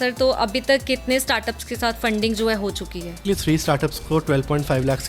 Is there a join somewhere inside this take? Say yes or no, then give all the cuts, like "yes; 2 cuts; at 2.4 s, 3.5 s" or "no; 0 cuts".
yes; 1 cut; at 3.2 s